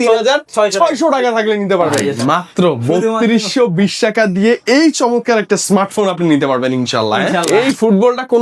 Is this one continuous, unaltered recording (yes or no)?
no